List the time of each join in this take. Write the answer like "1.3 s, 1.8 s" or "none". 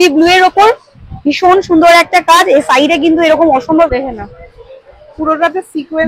3.9 s